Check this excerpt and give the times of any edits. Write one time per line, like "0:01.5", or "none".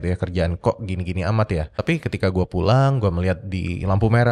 0:01.7